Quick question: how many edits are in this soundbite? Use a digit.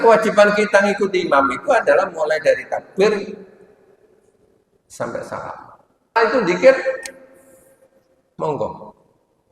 1